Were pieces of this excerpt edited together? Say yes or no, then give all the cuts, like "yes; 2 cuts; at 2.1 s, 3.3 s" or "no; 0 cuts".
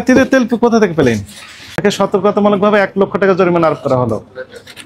yes; 1 cut; at 1.7 s